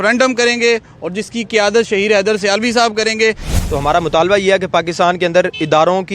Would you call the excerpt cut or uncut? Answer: cut